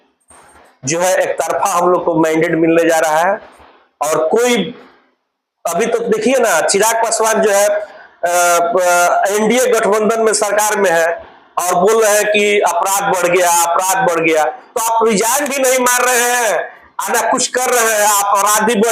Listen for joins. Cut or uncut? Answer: uncut